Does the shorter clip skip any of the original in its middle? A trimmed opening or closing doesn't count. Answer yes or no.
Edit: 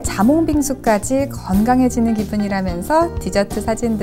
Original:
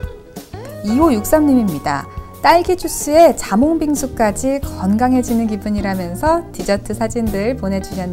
no